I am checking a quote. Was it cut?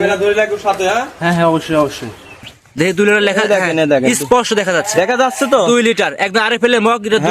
yes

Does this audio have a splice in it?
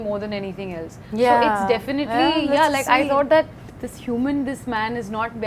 no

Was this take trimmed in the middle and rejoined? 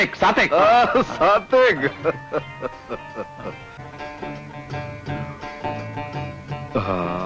no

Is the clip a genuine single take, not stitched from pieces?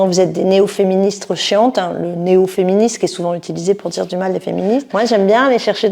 yes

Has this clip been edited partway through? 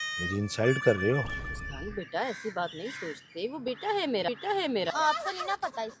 yes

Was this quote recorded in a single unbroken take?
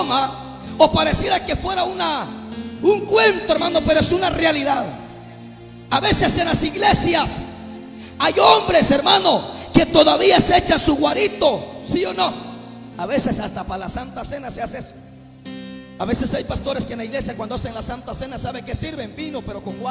yes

